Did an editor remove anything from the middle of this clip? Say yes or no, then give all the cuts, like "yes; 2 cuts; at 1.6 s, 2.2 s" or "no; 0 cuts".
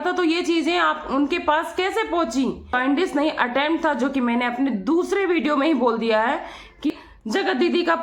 yes; 2 cuts; at 2.8 s, 6.9 s